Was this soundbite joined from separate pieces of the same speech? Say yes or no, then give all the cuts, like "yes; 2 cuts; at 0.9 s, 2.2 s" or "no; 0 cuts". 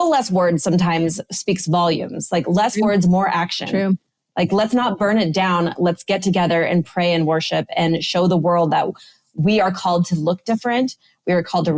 no; 0 cuts